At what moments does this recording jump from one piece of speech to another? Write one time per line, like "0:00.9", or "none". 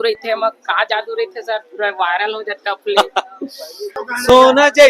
0:04.0